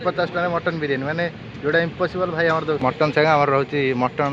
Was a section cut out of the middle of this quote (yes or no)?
yes